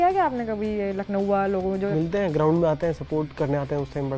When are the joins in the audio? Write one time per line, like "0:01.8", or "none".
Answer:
0:01.9